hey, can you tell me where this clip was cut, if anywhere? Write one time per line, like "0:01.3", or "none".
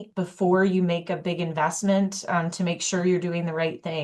none